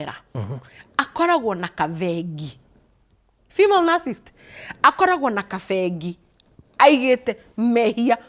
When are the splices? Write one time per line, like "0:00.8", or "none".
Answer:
none